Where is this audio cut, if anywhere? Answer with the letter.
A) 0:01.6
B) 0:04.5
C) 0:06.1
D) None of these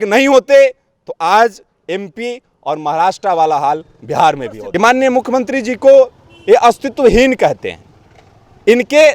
B